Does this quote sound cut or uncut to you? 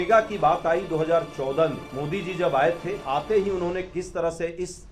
cut